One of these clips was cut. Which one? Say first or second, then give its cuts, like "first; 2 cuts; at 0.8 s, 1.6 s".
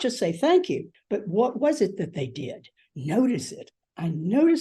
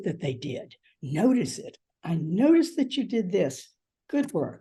first; 1 cut; at 0.9 s